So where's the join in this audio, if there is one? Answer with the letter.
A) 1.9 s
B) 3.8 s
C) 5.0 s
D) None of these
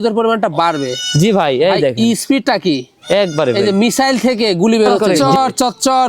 C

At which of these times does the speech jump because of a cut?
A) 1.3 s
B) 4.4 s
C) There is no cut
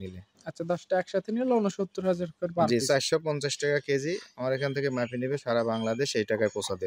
C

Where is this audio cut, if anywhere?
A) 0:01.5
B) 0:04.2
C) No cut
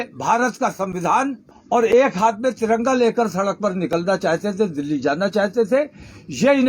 A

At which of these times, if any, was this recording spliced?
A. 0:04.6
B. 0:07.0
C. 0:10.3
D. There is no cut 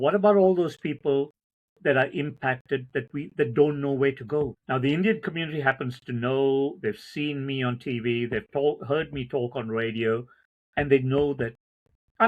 A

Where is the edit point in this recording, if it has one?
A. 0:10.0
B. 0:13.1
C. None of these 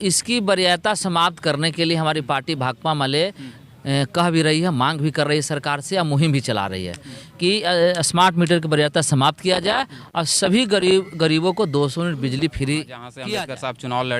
B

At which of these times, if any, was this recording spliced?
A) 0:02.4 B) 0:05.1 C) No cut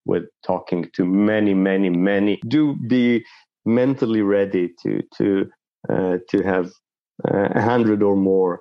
A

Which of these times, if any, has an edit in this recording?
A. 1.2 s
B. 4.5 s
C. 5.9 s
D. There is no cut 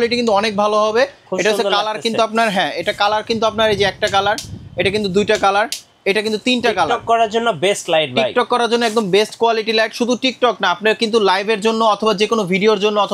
A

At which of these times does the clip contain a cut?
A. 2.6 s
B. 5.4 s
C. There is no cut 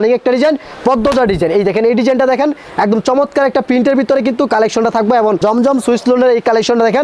B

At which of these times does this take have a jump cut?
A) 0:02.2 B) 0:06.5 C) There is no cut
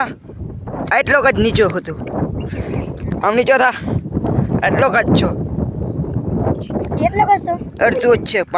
C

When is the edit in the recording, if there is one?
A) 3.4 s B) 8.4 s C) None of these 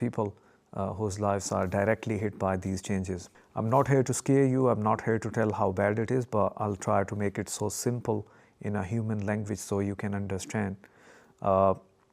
A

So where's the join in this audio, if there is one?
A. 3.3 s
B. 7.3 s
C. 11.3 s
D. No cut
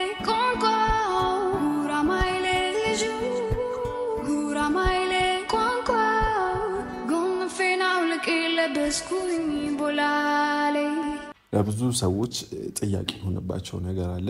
C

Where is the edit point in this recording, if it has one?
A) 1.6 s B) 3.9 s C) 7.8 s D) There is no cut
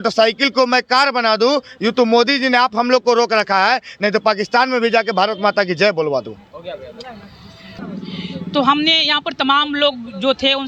D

